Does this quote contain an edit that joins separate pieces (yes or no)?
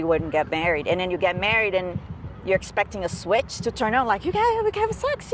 no